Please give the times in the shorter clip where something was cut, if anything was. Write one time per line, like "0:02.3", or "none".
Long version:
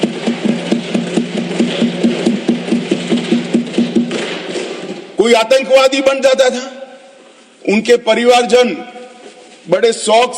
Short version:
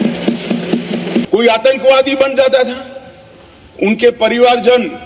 0:01.3